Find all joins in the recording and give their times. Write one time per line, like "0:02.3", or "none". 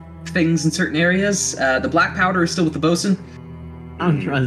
none